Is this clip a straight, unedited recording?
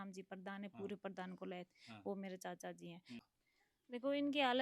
no; 1 cut; at 3.2 s

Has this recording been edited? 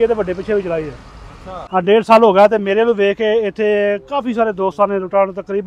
yes; 1 cut; at 1.2 s

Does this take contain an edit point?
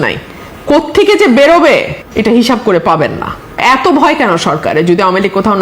yes; 1 cut; at 3.6 s

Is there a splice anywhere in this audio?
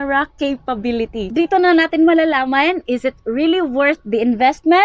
yes; 1 cut; at 1.2 s

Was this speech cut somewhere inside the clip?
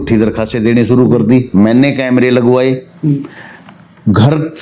no; 0 cuts

